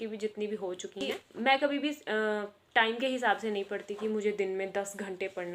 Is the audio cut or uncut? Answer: cut